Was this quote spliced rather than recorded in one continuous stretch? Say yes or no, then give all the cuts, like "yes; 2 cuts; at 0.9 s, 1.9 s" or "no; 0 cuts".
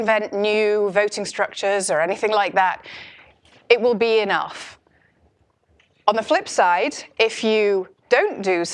yes; 1 cut; at 2.7 s